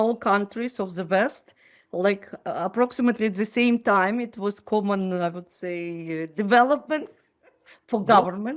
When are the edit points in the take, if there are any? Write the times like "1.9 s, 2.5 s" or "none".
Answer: none